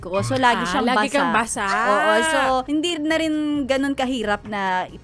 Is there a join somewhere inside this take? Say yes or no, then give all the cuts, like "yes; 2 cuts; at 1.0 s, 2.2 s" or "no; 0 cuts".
yes; 1 cut; at 2.7 s